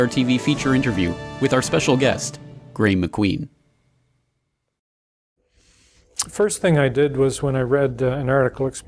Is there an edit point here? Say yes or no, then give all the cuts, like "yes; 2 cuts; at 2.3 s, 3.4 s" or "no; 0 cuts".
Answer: yes; 1 cut; at 6.7 s